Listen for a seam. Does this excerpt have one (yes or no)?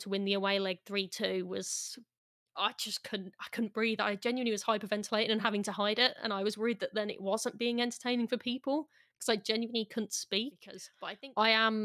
yes